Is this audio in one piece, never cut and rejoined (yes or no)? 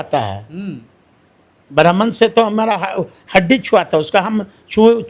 yes